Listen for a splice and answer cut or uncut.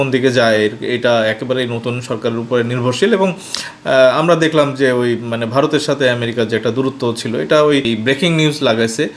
cut